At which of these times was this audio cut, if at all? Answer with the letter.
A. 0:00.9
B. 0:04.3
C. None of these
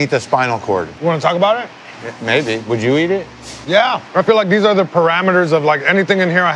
A